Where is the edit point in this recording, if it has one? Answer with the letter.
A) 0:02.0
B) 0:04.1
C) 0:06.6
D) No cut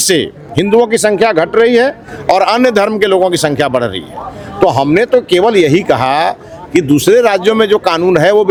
D